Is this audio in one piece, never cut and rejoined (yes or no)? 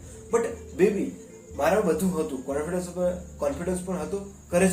yes